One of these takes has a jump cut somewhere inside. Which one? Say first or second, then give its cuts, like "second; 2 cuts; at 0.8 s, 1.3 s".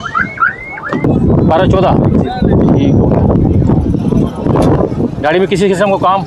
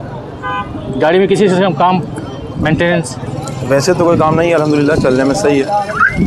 first; 1 cut; at 1.0 s